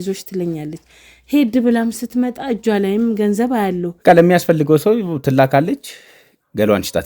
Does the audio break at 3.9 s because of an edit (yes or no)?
yes